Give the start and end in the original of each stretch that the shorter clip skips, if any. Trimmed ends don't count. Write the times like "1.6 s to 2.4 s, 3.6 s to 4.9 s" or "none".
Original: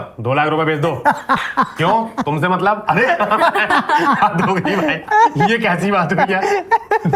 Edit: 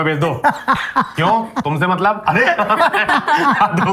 none